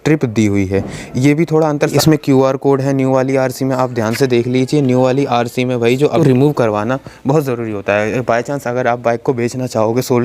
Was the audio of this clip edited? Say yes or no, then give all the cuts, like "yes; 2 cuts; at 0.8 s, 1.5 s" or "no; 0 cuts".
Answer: yes; 2 cuts; at 1.9 s, 6.1 s